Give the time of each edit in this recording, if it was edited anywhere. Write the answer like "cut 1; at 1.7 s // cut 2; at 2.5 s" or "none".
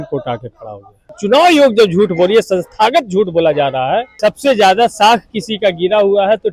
cut 1; at 1.1 s // cut 2; at 4.1 s